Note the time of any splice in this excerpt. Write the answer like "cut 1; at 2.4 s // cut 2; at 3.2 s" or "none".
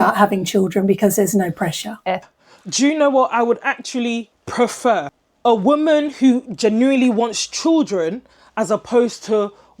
cut 1; at 2.3 s